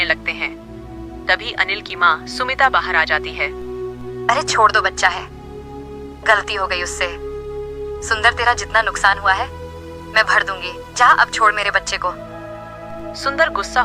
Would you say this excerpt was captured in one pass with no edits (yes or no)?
yes